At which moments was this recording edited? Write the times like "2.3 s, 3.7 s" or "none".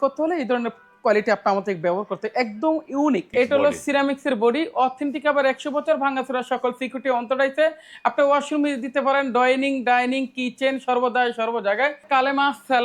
3.3 s, 12.1 s